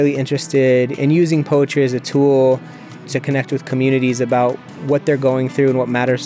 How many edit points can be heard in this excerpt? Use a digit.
2